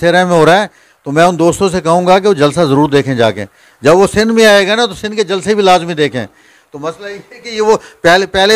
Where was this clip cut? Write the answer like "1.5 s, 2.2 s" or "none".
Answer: none